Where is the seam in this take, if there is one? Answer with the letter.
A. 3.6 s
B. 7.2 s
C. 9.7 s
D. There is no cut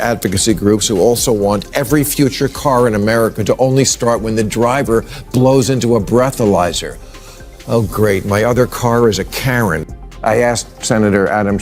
C